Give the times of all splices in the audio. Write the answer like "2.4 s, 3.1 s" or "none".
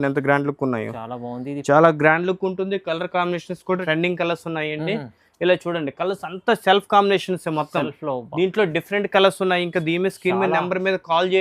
3.8 s